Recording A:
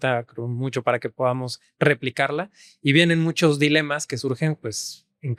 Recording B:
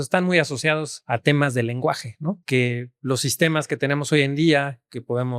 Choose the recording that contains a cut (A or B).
B